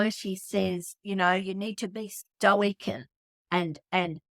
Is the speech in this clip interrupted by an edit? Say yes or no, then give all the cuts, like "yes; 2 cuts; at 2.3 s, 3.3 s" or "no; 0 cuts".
no; 0 cuts